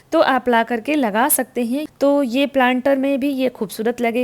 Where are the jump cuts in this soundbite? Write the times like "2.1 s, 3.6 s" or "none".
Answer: 1.9 s